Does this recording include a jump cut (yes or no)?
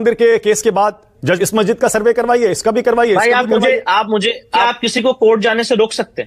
yes